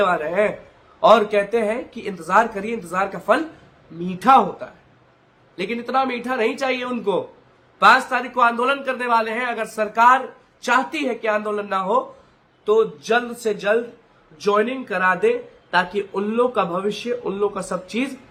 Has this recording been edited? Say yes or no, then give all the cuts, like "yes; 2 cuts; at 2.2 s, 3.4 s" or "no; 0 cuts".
no; 0 cuts